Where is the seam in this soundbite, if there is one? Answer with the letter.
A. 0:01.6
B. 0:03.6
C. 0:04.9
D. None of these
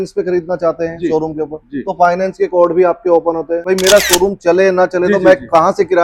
B